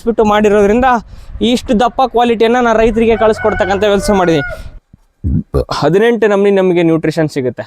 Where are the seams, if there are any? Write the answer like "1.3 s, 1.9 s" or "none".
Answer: 4.7 s